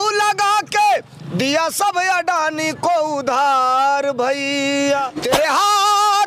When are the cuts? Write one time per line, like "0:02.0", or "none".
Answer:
0:05.2